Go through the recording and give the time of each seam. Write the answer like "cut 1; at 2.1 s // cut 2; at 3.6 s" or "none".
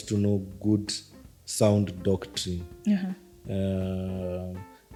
none